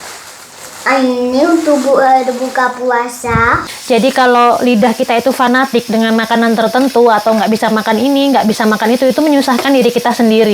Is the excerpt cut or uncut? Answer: cut